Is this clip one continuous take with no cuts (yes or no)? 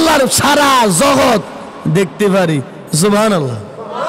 yes